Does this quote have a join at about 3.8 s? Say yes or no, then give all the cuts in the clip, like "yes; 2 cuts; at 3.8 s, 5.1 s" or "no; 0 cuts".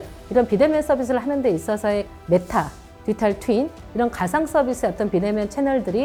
no; 0 cuts